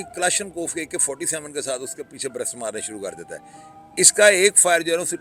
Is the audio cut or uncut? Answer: uncut